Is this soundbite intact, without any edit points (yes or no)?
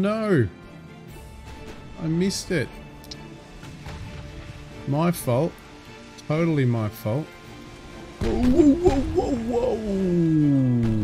yes